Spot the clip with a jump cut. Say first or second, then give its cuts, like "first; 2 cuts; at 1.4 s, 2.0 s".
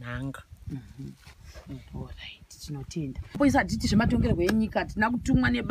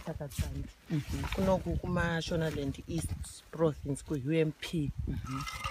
first; 1 cut; at 3.4 s